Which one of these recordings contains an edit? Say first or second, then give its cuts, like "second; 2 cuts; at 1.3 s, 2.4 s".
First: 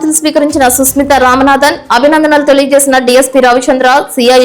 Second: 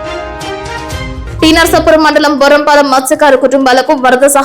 second; 1 cut; at 1.3 s